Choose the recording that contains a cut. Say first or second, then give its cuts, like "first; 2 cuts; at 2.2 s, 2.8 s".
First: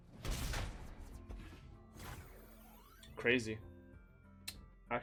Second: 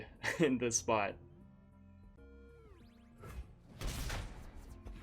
second; 1 cut; at 2.2 s